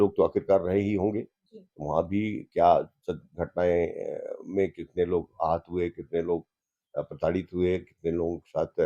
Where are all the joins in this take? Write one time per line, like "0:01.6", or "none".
none